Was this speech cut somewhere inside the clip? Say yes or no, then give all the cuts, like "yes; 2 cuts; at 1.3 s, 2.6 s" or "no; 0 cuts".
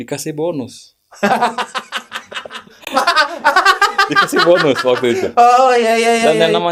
no; 0 cuts